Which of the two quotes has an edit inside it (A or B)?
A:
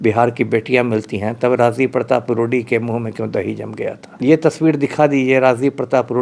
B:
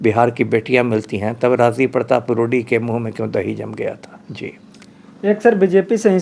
A